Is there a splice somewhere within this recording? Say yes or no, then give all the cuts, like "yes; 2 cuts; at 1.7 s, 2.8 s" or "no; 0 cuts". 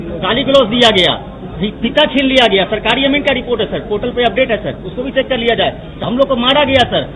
yes; 1 cut; at 6.0 s